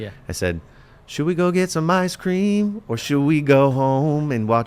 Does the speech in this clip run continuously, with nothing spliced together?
yes; 0 cuts

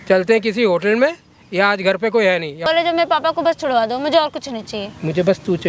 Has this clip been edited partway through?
yes; 1 cut; at 2.7 s

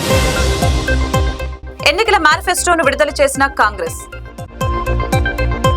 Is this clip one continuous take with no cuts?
yes; 0 cuts

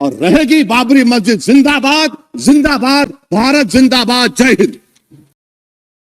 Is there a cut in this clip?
no; 0 cuts

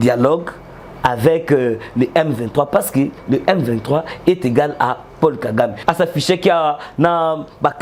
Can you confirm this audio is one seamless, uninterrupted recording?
no; 1 cut; at 5.8 s

